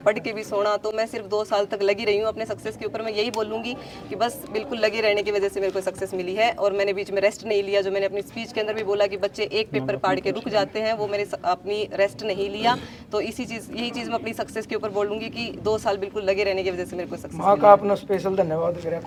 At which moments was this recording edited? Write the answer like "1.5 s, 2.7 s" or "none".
none